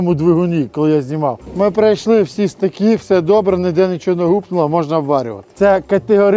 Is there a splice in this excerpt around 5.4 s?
yes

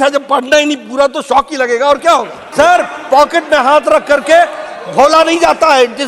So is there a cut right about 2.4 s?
yes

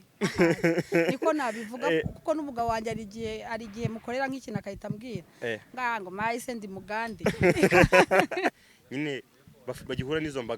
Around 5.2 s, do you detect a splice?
no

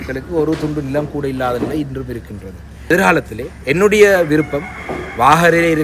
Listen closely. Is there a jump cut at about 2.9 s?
yes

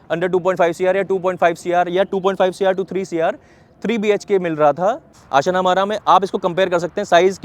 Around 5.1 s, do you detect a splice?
yes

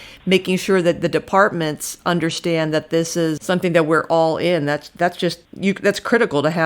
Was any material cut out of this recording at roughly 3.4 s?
yes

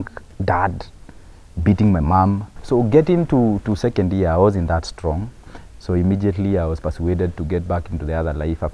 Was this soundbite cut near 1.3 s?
no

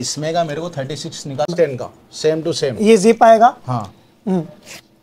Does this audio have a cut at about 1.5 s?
yes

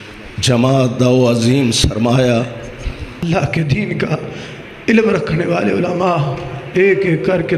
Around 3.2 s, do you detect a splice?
yes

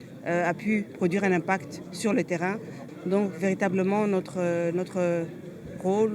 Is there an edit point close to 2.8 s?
yes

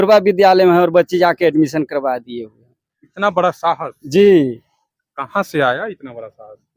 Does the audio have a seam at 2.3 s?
no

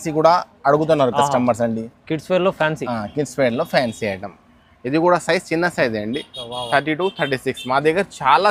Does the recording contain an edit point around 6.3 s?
no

